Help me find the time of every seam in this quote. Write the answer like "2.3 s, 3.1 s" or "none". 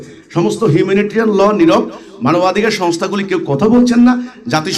none